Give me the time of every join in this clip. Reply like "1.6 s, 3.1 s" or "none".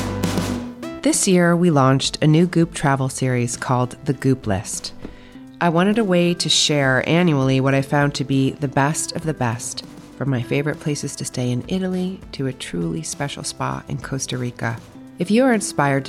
0.9 s